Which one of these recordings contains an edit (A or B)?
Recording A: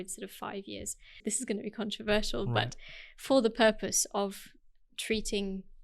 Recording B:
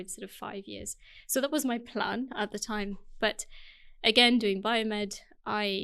A